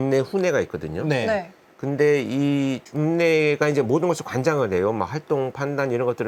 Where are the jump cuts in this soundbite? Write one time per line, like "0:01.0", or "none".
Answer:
none